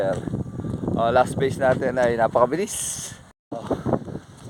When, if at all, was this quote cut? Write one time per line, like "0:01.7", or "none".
0:03.4